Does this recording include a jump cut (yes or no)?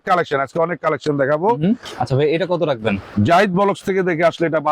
yes